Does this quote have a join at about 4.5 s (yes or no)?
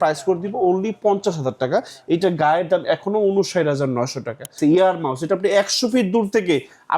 yes